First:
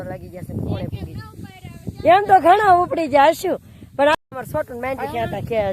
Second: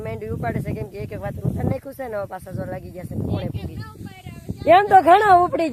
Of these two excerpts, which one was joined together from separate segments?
first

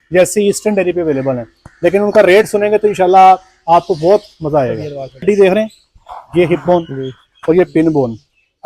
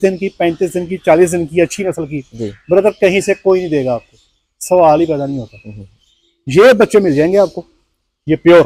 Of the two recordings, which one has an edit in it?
first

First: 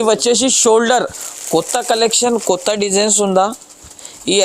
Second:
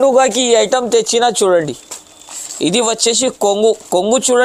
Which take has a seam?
first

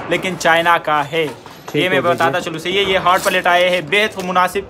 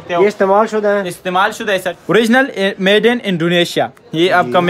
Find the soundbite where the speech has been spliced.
second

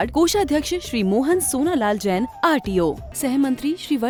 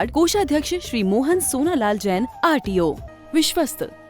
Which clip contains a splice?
second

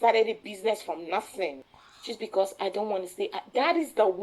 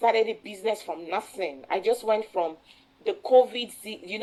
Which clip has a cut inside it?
first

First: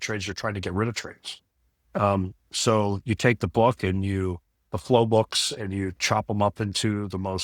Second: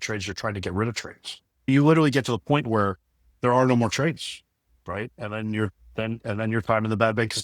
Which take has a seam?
second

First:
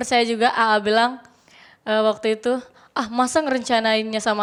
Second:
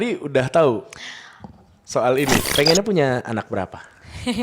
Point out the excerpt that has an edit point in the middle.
second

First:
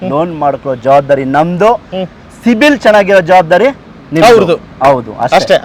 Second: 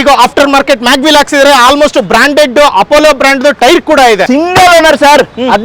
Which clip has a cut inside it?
second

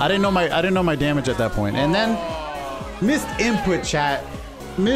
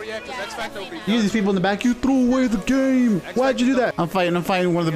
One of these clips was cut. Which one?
second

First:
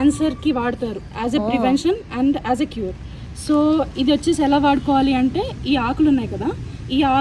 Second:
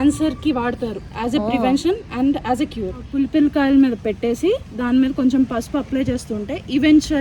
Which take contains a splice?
second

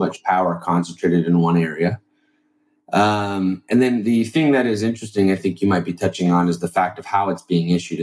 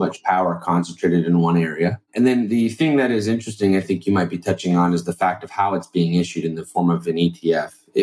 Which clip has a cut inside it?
second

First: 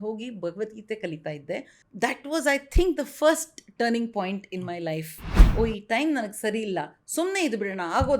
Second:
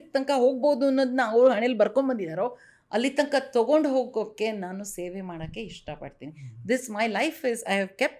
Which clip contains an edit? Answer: first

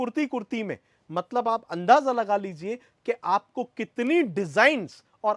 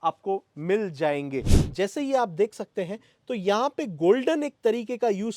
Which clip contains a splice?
second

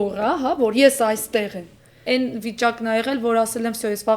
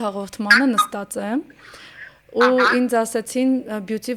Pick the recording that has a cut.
first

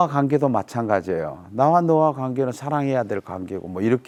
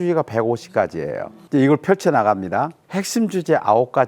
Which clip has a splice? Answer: second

